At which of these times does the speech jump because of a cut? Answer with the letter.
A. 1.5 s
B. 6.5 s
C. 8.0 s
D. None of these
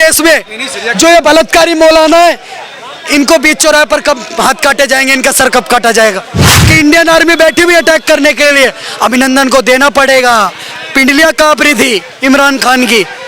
B